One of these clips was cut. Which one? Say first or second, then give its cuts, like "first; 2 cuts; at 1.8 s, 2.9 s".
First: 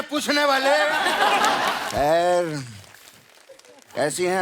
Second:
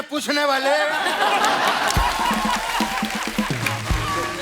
first; 1 cut; at 1.8 s